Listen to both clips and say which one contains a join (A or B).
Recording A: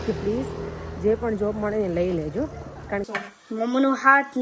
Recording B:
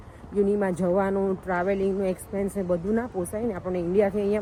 A